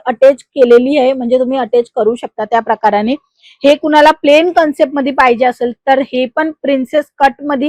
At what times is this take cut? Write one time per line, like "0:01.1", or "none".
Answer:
none